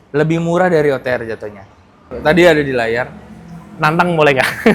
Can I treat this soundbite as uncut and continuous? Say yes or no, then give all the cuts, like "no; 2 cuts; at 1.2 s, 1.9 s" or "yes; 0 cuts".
no; 1 cut; at 2.1 s